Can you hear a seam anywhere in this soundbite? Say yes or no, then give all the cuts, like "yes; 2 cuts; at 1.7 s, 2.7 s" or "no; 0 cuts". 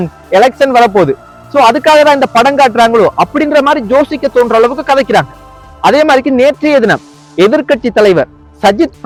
no; 0 cuts